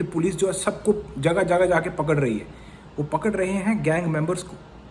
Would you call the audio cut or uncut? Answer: uncut